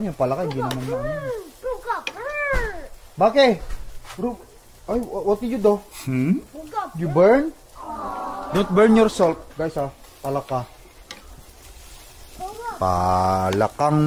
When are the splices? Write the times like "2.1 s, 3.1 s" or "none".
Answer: none